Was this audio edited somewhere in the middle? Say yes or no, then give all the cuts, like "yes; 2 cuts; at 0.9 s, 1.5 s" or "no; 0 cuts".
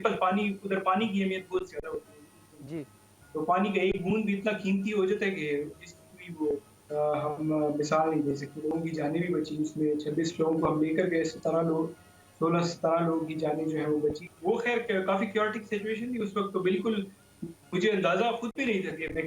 yes; 2 cuts; at 8.7 s, 14.3 s